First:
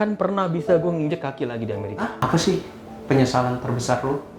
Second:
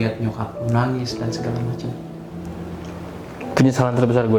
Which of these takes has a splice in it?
first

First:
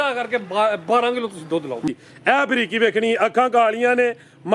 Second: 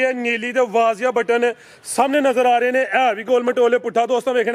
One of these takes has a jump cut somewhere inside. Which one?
first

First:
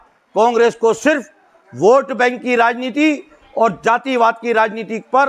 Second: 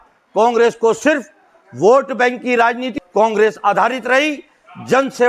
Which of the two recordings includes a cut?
second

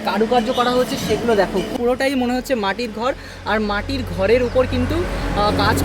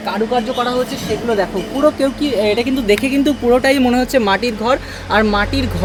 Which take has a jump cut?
first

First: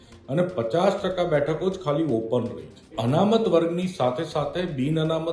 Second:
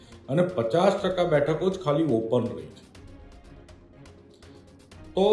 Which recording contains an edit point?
first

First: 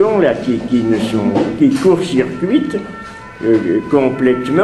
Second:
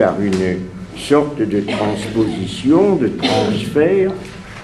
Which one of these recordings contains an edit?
first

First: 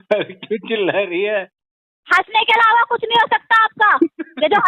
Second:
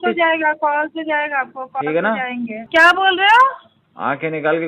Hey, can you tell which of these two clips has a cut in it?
second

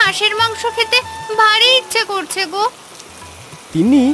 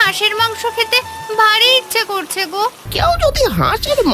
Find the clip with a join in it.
second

